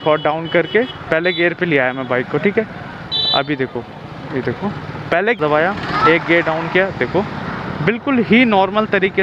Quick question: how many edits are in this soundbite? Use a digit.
1